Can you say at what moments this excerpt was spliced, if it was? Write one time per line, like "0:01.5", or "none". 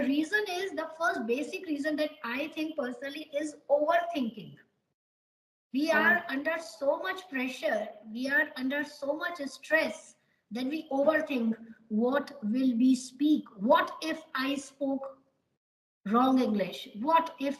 none